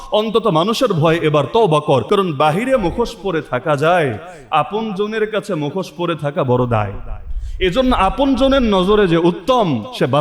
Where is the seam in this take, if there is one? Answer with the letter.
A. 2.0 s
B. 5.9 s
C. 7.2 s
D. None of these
A